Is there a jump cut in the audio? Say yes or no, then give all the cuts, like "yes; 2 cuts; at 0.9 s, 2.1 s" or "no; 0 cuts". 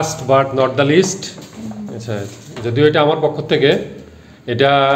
no; 0 cuts